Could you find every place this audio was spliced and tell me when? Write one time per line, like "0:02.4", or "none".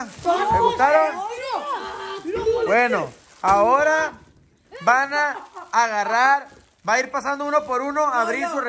none